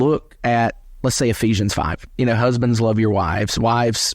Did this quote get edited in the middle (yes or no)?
yes